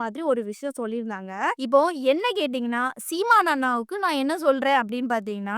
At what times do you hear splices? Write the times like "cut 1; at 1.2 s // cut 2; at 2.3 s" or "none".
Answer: cut 1; at 1.6 s

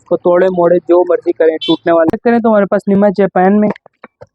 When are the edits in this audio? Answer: none

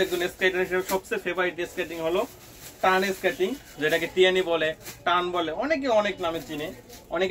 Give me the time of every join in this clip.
none

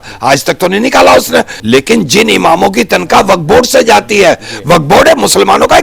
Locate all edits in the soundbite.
cut 1; at 1.6 s

